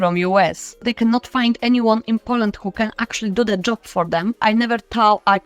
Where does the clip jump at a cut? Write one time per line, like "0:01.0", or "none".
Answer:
0:00.9
0:04.4